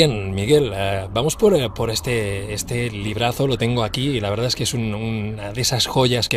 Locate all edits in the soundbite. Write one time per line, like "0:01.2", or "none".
0:04.0